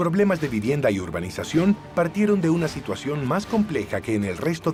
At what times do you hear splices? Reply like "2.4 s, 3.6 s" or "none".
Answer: none

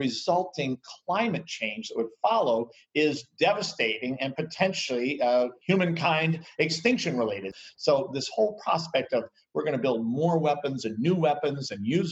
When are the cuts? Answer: 5.6 s, 7.5 s

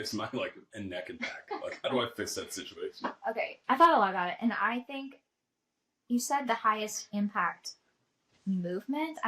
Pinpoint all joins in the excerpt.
3.6 s

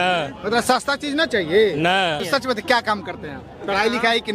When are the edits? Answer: 2.2 s

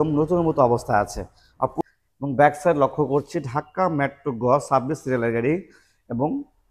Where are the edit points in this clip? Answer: 1.7 s

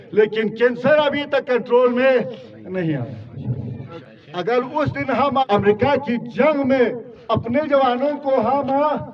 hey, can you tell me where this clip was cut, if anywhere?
3.9 s, 5.5 s

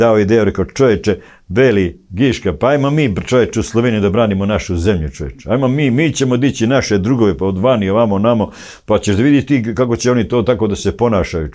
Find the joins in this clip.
none

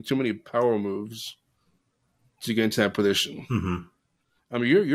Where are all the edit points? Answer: none

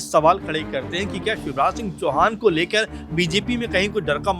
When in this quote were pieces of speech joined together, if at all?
none

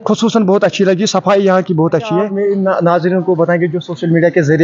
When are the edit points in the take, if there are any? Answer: 2.3 s

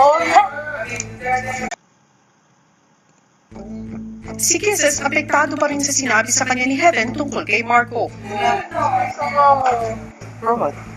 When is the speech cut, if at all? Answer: none

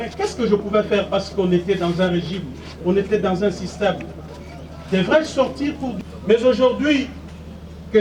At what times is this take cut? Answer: 5.9 s

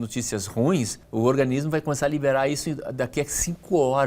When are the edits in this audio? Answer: 1.0 s

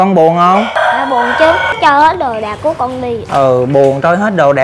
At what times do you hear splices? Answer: 0.7 s, 1.7 s, 3.2 s

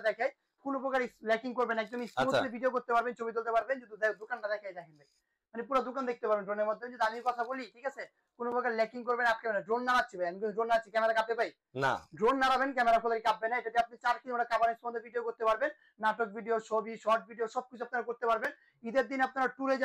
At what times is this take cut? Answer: none

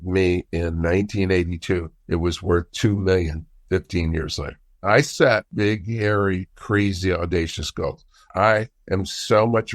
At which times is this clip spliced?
1.9 s, 4.8 s

